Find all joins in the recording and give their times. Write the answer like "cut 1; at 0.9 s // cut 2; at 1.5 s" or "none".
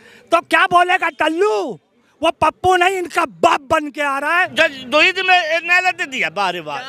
cut 1; at 4.5 s